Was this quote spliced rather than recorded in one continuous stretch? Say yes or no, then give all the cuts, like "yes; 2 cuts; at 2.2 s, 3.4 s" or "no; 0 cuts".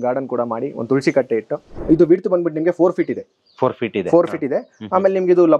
yes; 1 cut; at 1.7 s